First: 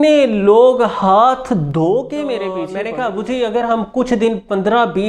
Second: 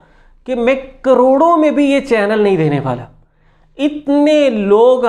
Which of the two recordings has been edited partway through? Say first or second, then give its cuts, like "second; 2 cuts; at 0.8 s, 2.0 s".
first; 1 cut; at 2.6 s